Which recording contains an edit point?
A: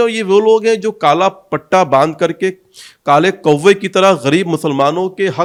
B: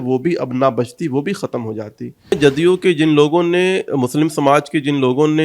B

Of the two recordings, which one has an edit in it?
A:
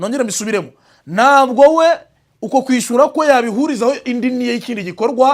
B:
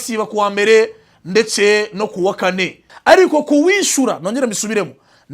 B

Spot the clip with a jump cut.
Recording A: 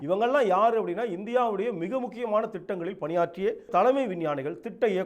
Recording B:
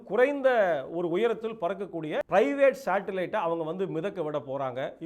B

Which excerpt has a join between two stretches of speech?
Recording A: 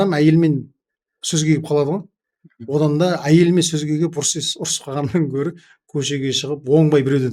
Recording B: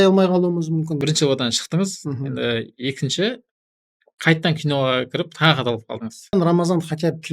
B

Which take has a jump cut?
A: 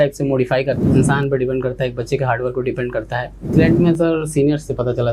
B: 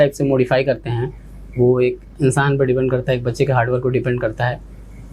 A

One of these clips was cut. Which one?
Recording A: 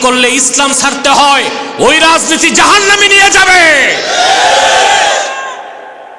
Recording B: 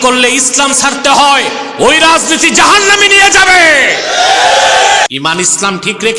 B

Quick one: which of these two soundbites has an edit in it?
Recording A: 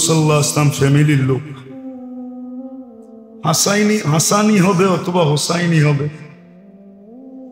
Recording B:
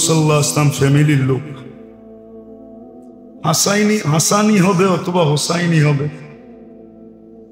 A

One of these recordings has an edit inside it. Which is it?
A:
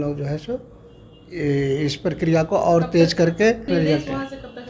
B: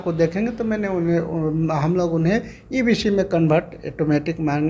A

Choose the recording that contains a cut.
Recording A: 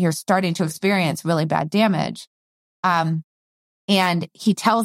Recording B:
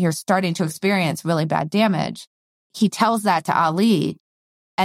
B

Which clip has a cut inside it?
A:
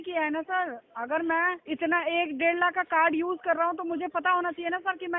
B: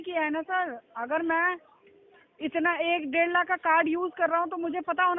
A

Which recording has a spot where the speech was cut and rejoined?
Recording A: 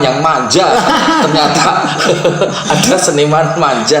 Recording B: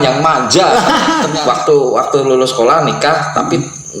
B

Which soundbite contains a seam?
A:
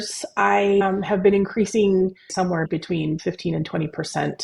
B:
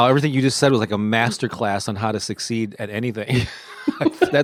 A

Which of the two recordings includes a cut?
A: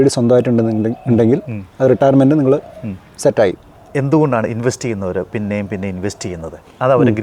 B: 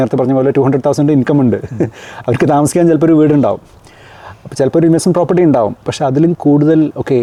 A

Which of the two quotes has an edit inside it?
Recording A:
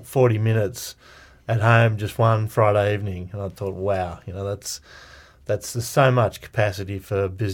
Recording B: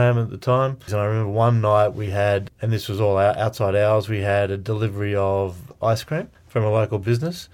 B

